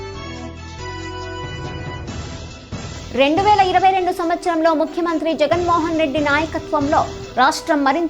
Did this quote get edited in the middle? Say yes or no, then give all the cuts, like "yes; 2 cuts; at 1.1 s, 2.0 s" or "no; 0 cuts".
no; 0 cuts